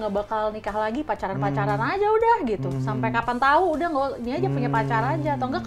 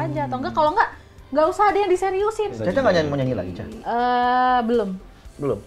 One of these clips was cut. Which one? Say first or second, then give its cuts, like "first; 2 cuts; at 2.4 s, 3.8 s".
second; 1 cut; at 2.6 s